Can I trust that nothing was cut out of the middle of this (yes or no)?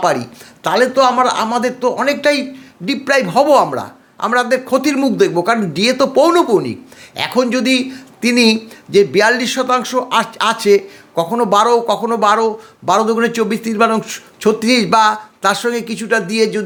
yes